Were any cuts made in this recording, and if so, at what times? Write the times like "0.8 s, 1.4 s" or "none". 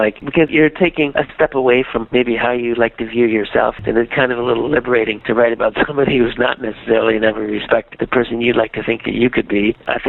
3.8 s